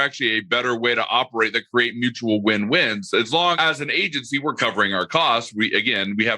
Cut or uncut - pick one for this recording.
cut